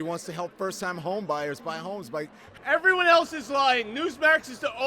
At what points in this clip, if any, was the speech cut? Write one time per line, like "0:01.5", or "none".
0:02.4